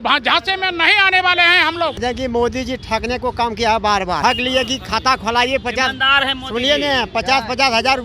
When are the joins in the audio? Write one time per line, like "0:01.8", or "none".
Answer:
0:02.0
0:04.2